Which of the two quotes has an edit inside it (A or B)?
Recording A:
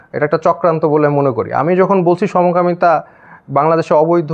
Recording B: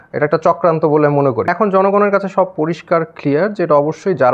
B